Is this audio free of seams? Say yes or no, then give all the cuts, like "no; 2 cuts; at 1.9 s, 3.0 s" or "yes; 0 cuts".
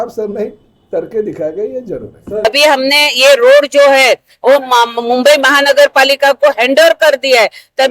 no; 1 cut; at 2.4 s